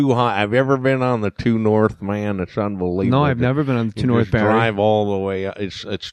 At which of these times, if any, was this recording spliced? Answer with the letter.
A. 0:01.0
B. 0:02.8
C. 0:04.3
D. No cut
C